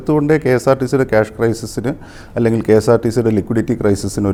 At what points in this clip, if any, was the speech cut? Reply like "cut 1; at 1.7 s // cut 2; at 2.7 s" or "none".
none